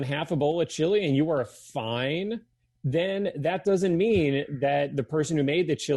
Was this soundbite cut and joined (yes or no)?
no